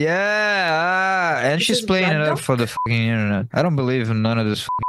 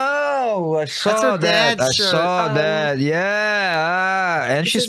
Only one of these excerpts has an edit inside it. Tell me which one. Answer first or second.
first